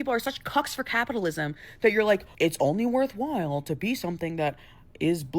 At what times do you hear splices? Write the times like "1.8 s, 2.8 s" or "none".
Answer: 2.3 s